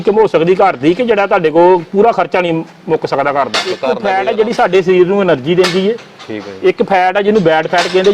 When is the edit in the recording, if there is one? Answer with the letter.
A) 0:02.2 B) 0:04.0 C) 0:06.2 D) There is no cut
B